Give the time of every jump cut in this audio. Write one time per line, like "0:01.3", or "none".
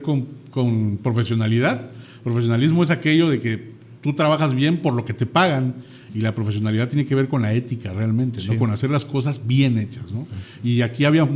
none

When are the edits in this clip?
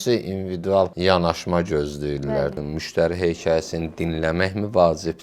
0:00.9
0:02.6

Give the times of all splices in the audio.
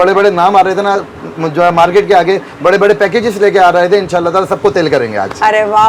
none

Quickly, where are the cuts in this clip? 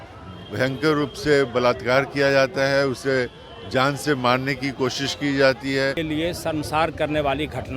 0:06.0

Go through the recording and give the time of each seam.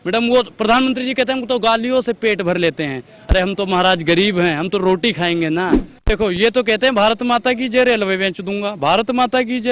0:05.9

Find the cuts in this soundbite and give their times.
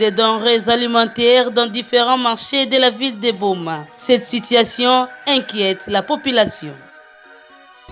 none

